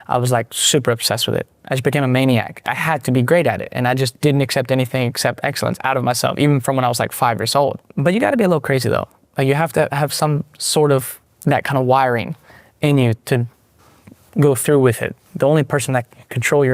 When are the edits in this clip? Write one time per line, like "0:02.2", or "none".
0:02.7
0:07.9
0:15.2